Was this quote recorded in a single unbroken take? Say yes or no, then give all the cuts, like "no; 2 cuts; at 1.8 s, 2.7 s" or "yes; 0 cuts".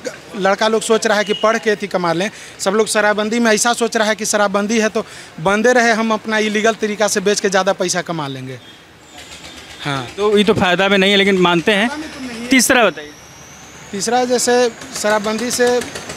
yes; 0 cuts